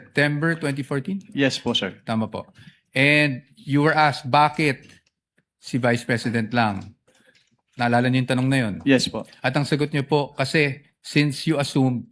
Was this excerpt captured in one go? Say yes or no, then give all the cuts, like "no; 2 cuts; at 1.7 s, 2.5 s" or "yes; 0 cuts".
yes; 0 cuts